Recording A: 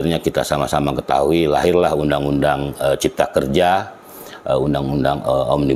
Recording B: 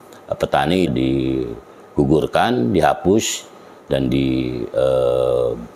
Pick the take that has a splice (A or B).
B